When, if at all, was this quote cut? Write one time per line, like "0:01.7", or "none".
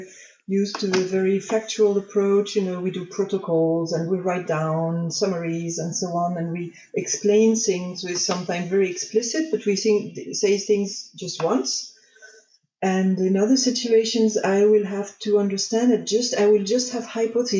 none